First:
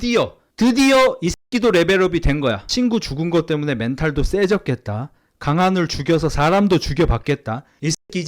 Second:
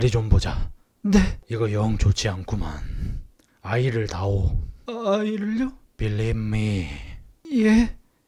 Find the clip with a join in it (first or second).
first